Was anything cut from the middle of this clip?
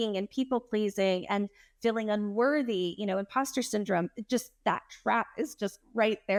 no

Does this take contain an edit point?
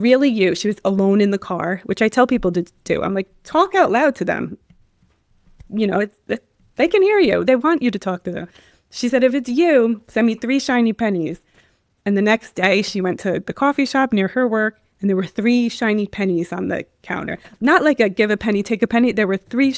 no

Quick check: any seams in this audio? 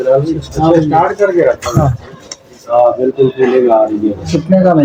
no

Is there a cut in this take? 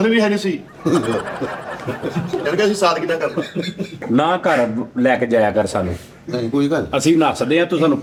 no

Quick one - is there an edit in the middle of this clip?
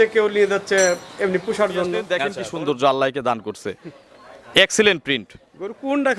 yes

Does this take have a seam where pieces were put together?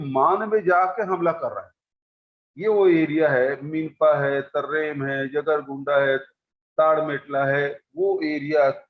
no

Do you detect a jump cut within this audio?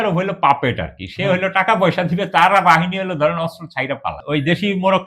yes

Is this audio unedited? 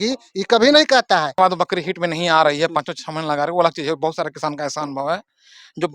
no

